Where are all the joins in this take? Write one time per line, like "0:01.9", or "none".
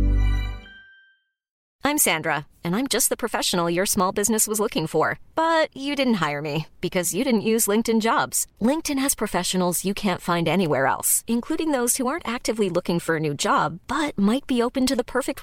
0:01.5